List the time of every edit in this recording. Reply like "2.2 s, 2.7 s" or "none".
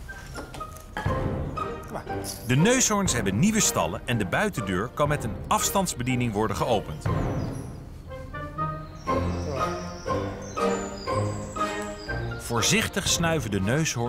3.0 s